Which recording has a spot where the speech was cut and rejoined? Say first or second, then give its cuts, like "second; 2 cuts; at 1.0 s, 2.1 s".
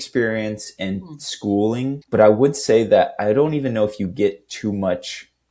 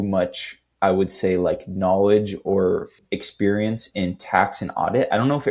second; 1 cut; at 3.0 s